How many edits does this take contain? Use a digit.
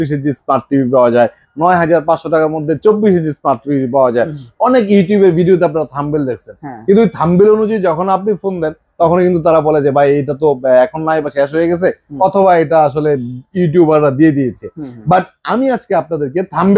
0